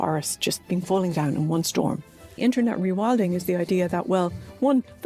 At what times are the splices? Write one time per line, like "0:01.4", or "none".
0:02.4